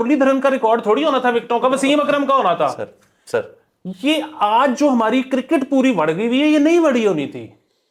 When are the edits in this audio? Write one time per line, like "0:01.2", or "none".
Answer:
none